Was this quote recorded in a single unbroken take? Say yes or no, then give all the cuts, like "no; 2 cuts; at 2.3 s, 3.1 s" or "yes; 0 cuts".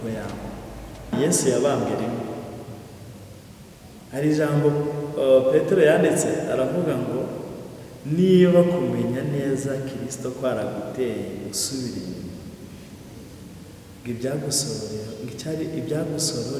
no; 1 cut; at 1.0 s